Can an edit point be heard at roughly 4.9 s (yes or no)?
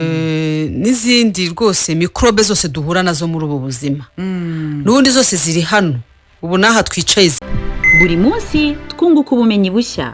no